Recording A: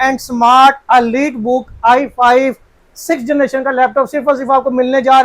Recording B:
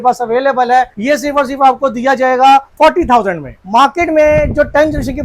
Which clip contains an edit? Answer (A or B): B